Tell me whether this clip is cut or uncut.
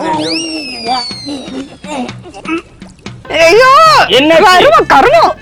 uncut